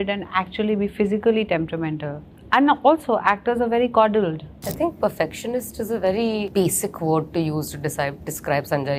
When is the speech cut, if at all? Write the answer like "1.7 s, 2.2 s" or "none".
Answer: 4.7 s